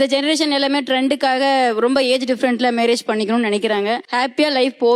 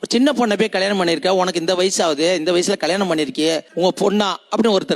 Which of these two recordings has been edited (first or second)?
first